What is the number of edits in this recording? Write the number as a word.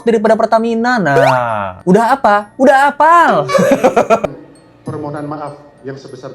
one